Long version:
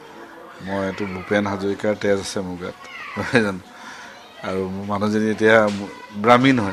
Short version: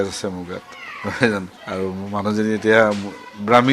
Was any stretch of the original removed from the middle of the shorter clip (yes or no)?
yes